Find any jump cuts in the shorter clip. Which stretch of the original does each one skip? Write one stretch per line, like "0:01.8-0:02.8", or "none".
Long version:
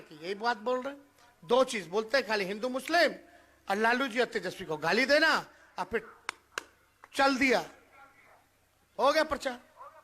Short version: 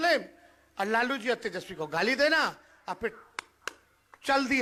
none